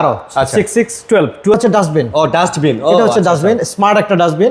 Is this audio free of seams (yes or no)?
no